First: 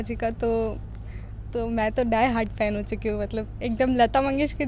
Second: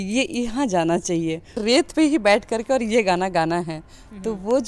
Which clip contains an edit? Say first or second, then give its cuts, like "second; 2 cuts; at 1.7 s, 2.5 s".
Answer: second; 1 cut; at 1.6 s